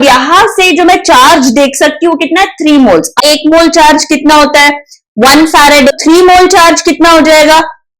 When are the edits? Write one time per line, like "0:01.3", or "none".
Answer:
0:03.2
0:05.9